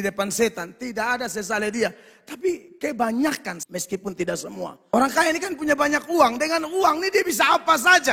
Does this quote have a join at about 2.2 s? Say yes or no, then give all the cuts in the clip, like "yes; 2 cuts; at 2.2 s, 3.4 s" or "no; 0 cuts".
no; 2 cuts; at 3.5 s, 4.8 s